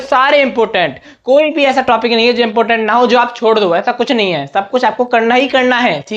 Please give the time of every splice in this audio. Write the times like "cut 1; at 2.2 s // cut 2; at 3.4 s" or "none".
none